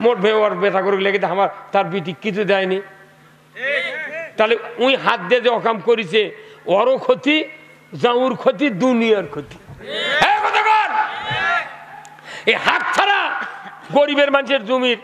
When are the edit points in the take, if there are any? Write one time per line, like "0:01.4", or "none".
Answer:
none